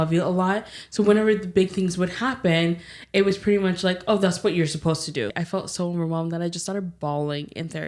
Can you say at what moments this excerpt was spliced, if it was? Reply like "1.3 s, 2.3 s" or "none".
5.3 s